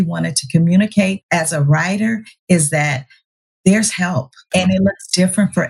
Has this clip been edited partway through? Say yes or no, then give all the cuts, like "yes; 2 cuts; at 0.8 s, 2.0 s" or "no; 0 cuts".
yes; 2 cuts; at 1.2 s, 4.5 s